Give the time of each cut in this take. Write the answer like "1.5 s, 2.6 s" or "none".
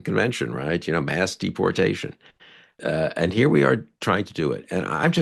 2.7 s

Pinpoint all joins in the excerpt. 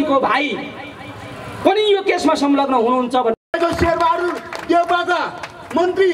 3.5 s

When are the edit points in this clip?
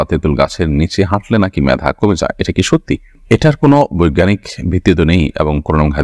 none

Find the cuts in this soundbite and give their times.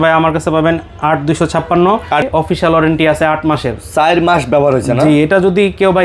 2.3 s

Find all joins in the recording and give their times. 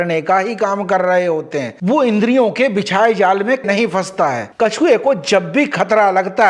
1.7 s, 4.4 s

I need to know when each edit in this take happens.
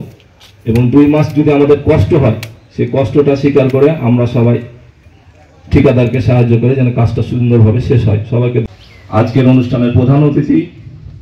8.7 s

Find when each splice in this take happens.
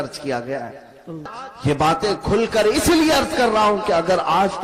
1.3 s

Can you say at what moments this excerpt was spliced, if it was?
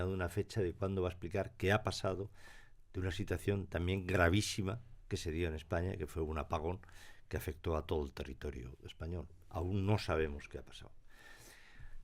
none

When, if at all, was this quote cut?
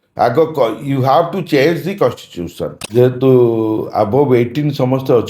2.8 s

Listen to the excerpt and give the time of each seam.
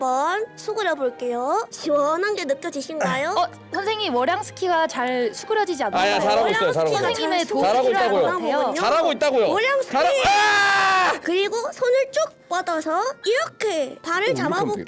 11.2 s

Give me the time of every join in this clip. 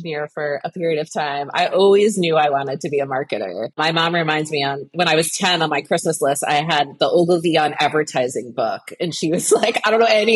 3.8 s, 4.9 s

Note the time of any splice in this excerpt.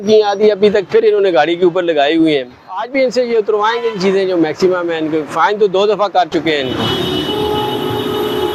none

